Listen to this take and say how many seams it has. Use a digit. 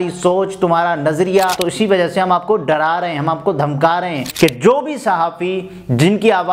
2